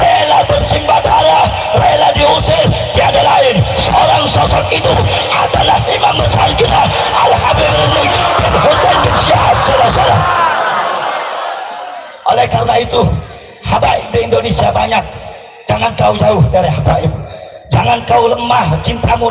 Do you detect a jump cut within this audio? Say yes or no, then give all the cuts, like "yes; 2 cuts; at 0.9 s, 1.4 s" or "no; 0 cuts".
no; 0 cuts